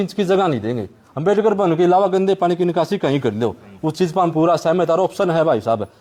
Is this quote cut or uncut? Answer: uncut